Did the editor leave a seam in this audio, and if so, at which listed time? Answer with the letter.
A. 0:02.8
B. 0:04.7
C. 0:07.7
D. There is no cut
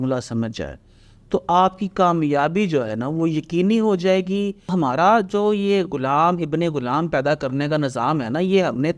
B